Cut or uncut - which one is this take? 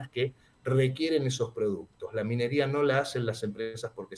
uncut